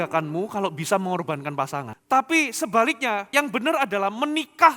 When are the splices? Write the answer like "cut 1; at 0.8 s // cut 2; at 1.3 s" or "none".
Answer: cut 1; at 1.9 s // cut 2; at 3.3 s